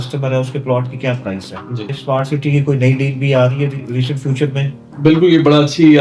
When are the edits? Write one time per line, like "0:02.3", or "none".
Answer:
0:01.9